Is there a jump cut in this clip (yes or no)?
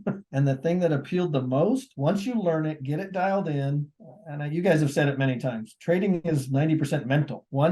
no